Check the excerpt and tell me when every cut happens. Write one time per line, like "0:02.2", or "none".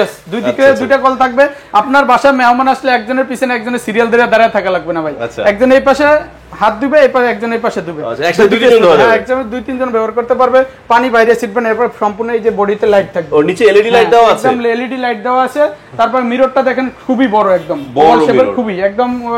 none